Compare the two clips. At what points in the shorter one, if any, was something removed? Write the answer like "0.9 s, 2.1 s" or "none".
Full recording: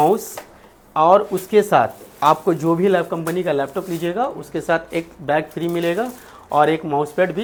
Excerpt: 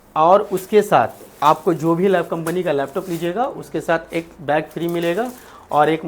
none